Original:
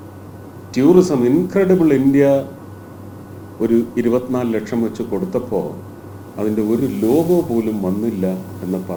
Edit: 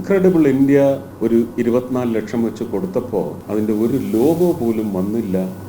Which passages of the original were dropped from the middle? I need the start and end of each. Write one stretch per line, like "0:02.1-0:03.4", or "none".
0:02.5-0:03.5
0:05.8-0:06.3